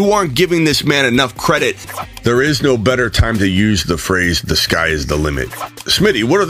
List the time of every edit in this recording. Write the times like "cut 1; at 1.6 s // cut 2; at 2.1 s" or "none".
cut 1; at 2.0 s // cut 2; at 5.5 s